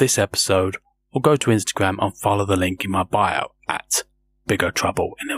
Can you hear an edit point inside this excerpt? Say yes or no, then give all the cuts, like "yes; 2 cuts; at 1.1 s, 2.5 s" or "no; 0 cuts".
no; 0 cuts